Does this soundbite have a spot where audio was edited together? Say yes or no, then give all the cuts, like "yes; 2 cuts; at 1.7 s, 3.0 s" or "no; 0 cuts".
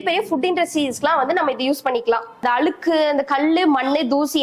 yes; 1 cut; at 2.4 s